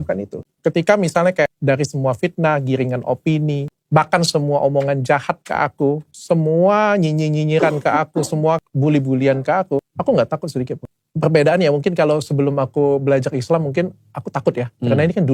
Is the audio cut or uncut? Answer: uncut